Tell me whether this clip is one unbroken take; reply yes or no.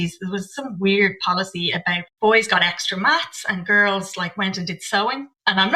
yes